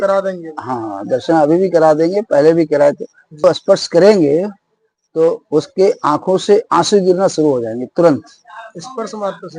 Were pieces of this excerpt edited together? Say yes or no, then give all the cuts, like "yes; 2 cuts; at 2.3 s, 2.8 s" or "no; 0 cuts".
yes; 1 cut; at 3.4 s